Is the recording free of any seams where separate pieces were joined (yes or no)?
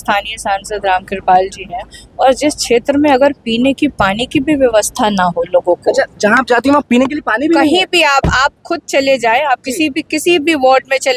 yes